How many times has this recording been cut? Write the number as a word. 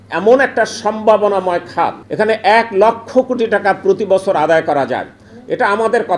one